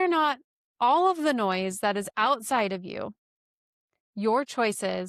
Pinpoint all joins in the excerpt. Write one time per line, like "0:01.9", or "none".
none